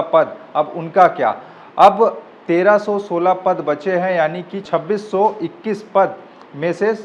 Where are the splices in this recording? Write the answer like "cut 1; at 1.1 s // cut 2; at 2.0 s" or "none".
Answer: cut 1; at 4.6 s